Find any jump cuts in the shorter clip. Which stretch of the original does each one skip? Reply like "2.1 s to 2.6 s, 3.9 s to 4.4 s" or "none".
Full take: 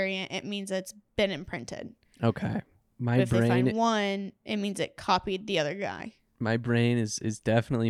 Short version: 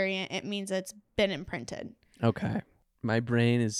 2.8 s to 6.2 s

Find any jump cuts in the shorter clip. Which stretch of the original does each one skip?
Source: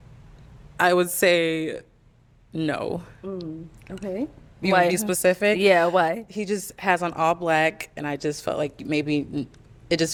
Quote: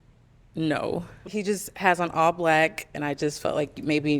3.2 s to 6.2 s

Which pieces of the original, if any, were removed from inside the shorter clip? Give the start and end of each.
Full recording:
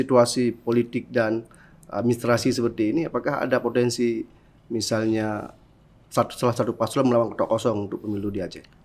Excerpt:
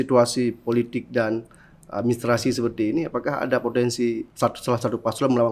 4.3 s to 6.0 s

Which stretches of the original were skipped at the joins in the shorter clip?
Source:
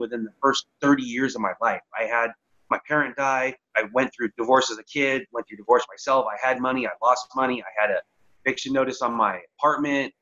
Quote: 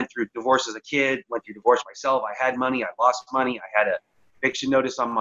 none

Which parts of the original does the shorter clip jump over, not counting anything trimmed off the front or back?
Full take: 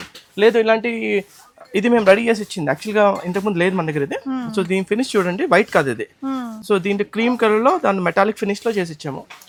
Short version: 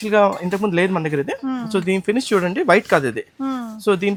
none

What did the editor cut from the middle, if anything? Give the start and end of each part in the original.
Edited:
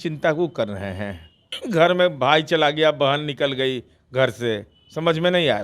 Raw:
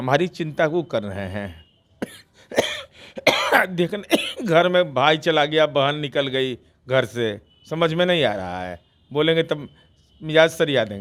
1.9 s to 4.3 s

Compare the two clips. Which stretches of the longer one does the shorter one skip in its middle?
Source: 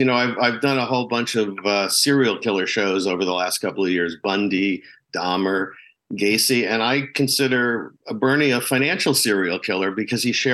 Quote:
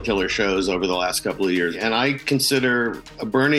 4.2 s to 6.7 s

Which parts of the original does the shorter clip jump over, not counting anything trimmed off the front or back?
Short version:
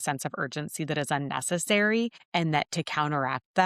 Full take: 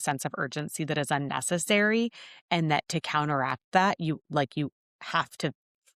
2.2 s to 2.4 s

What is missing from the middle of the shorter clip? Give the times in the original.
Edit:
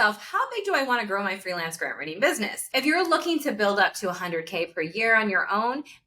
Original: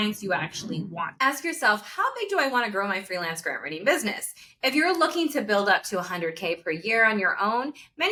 4.2 s to 4.5 s

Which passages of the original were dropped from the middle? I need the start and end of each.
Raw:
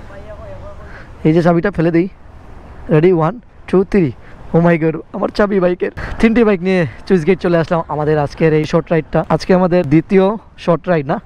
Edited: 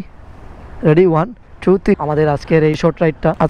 4.0 s to 7.9 s

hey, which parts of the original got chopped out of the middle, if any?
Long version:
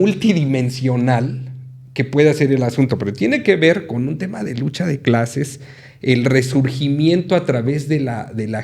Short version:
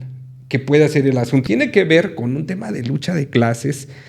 2.9 s to 3.2 s

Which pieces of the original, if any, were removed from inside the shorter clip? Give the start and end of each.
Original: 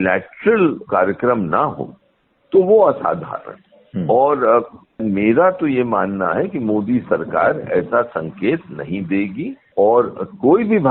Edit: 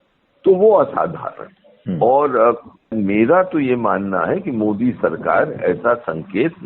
none

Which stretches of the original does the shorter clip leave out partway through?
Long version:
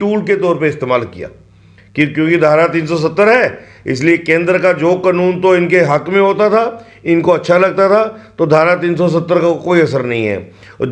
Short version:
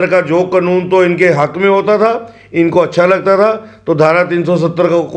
none

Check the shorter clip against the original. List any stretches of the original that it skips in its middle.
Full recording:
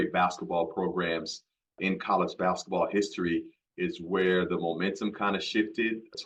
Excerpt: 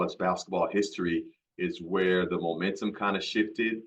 none

